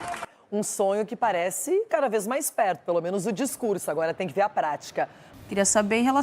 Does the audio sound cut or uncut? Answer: cut